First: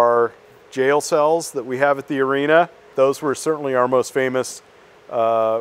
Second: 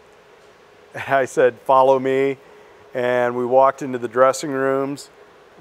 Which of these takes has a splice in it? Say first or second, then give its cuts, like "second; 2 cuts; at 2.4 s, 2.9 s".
first; 1 cut; at 2.8 s